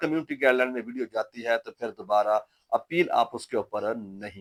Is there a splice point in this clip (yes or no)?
no